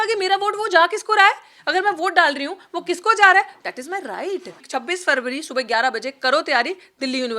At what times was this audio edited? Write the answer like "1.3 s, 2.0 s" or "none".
4.6 s